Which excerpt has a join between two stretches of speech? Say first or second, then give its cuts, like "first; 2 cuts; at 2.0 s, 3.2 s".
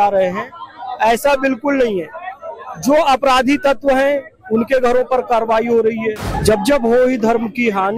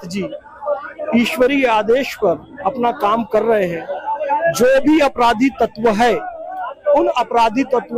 first; 1 cut; at 6.3 s